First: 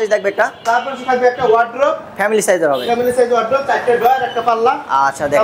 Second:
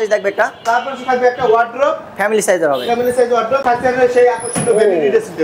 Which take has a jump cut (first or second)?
second